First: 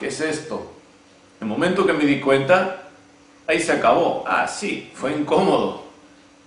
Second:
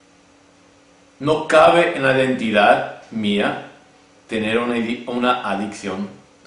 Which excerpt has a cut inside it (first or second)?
first